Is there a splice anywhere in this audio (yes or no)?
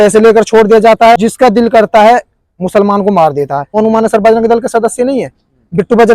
yes